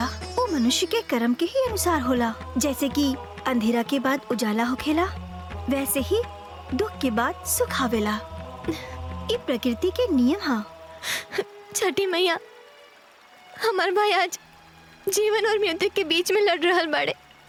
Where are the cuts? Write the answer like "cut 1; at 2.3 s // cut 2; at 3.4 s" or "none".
none